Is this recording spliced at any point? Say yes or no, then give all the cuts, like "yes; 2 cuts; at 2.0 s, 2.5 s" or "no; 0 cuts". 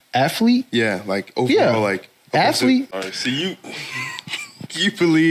yes; 1 cut; at 2.9 s